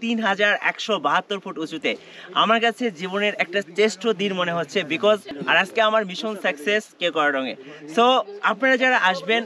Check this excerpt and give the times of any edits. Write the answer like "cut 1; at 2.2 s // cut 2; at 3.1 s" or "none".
none

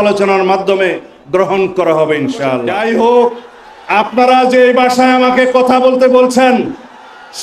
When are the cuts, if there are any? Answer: cut 1; at 2.7 s

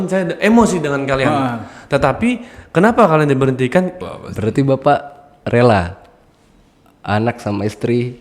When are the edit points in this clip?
cut 1; at 4.1 s

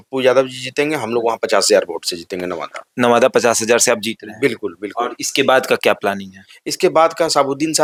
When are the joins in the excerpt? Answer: none

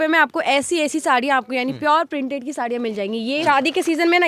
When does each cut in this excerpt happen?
cut 1; at 3.3 s

